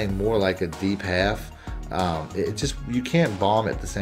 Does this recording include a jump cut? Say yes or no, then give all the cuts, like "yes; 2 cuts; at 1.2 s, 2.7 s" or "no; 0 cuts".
no; 0 cuts